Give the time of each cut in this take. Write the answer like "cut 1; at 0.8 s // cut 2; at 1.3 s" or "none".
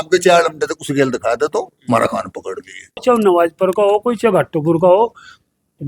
cut 1; at 3.0 s